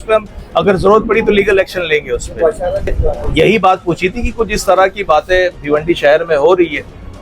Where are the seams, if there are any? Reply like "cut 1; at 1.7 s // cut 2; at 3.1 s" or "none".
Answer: cut 1; at 3.2 s

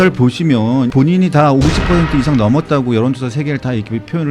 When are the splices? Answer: cut 1; at 0.9 s

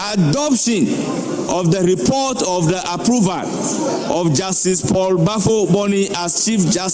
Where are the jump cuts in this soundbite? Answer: none

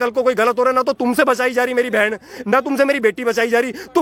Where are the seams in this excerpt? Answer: none

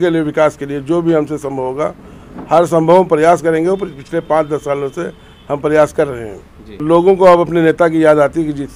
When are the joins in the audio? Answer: cut 1; at 6.7 s

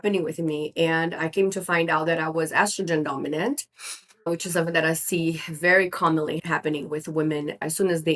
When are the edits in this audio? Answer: cut 1; at 6.4 s

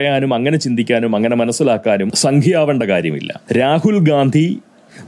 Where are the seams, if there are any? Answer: cut 1; at 2.1 s // cut 2; at 3.3 s

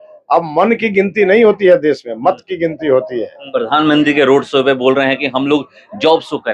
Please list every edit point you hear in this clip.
cut 1; at 3.4 s

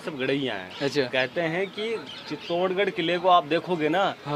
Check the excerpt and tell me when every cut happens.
none

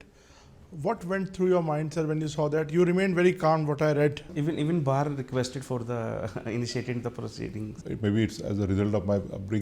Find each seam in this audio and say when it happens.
cut 1; at 4.2 s // cut 2; at 7.8 s

